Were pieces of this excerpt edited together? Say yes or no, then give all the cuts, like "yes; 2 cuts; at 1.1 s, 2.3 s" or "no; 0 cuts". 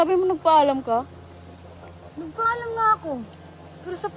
no; 0 cuts